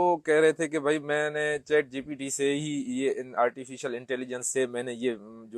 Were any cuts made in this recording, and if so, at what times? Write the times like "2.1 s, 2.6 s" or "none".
none